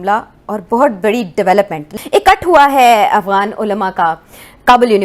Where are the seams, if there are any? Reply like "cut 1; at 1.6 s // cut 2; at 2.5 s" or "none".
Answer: cut 1; at 1.8 s